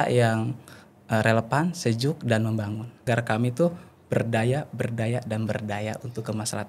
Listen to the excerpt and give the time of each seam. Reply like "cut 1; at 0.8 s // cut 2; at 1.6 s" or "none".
cut 1; at 3.0 s